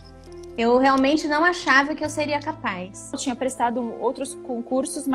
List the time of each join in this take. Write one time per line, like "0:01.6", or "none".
0:03.2